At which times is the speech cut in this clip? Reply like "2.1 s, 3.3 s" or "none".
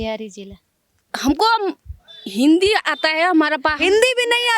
1.1 s